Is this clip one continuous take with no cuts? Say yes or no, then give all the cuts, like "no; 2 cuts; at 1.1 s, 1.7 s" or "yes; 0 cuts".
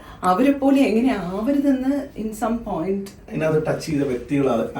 no; 1 cut; at 3.3 s